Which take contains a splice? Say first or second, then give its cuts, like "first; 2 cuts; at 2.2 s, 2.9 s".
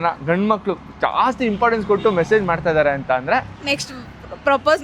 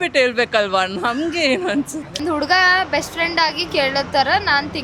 second; 1 cut; at 2.2 s